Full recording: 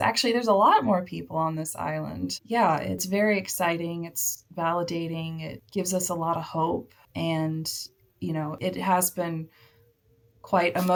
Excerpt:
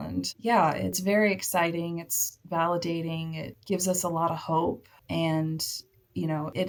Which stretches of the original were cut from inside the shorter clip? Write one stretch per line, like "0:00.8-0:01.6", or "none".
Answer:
none

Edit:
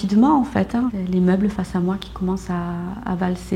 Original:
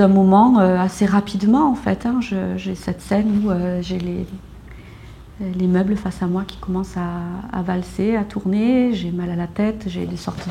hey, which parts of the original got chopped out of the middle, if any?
0:02.2-0:05.4

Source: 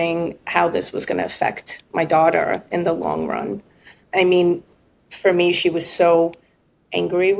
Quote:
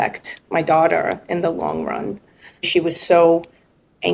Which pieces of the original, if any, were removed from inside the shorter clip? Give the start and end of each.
0:04.1-0:05.6

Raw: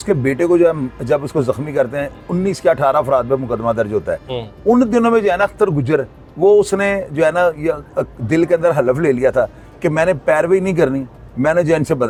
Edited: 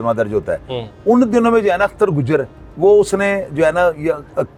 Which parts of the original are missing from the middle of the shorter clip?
none

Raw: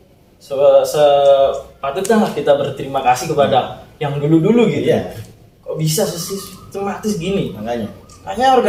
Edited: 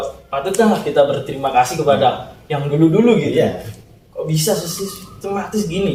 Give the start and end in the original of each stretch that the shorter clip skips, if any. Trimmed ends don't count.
none

